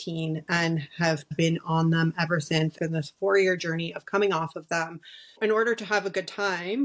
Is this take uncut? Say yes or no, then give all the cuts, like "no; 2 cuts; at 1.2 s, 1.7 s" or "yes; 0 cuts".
no; 3 cuts; at 1.3 s, 2.8 s, 5.4 s